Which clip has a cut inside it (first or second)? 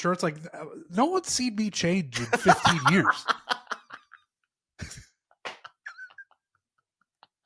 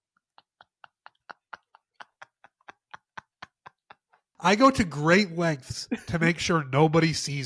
second